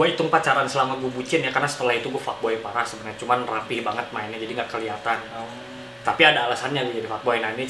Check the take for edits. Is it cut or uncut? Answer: uncut